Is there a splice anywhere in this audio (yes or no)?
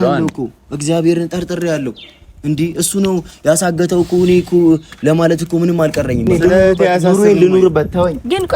yes